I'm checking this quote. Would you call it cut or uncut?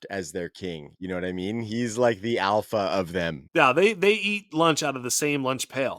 cut